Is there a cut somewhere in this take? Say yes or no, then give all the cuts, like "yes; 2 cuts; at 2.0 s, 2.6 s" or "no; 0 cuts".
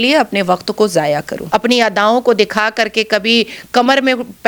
yes; 1 cut; at 1.4 s